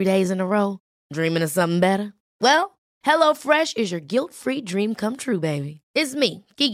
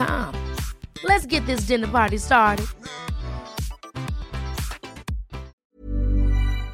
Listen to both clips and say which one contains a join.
second; 1 cut; at 5.5 s

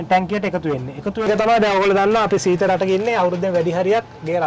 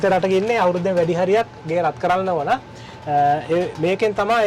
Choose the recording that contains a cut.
first; 1 cut; at 1.2 s

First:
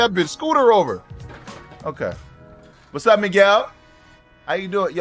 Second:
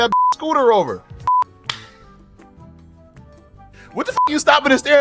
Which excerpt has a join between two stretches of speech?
second; 1 cut; at 1.5 s

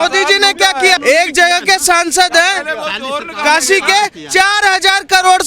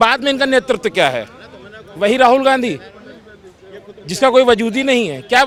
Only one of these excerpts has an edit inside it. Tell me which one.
first; 1 cut; at 1.0 s

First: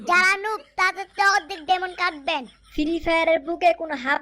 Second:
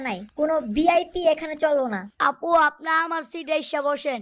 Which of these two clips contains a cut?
second; 1 cut; at 2.1 s

